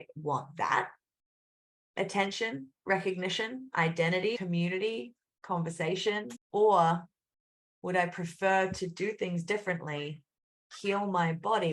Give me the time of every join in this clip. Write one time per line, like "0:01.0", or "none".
0:04.4
0:06.4